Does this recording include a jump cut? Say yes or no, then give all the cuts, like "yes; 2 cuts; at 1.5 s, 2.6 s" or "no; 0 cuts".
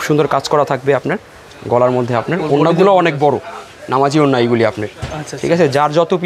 no; 0 cuts